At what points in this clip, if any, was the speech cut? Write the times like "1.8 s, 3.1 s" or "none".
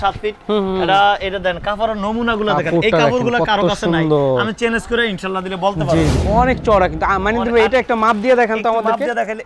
6.1 s